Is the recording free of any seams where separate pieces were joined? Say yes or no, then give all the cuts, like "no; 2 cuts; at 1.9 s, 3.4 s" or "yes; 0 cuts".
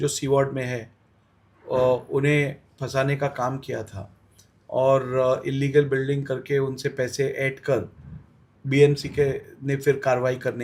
yes; 0 cuts